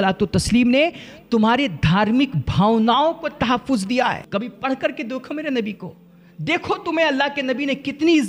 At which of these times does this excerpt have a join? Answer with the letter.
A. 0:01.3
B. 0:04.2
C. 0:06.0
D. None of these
B